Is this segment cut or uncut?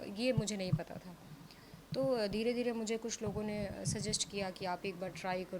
uncut